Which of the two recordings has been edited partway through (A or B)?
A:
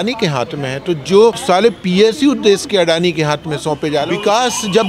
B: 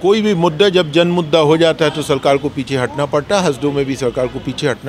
A